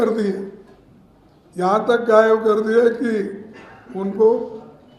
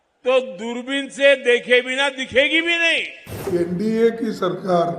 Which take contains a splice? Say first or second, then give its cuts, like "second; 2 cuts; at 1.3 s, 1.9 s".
second; 1 cut; at 3.5 s